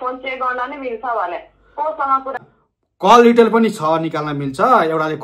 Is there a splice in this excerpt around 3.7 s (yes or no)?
no